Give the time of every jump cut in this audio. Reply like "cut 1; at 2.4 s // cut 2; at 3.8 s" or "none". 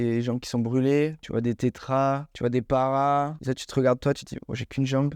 cut 1; at 1.2 s // cut 2; at 2.3 s // cut 3; at 3.4 s